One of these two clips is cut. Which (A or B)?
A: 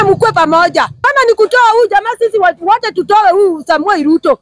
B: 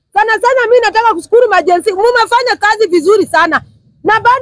A